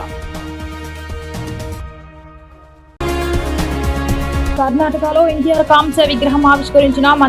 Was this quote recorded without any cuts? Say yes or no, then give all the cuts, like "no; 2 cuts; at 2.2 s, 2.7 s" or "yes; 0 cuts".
yes; 0 cuts